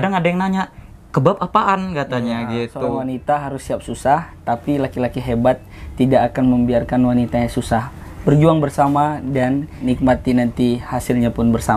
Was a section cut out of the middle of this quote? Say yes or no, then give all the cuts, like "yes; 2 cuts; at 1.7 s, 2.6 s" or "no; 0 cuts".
yes; 2 cuts; at 3.1 s, 9.7 s